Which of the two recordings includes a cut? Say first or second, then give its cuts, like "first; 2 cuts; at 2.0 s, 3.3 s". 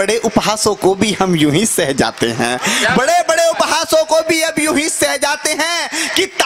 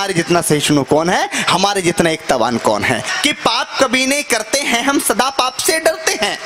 second; 1 cut; at 3.1 s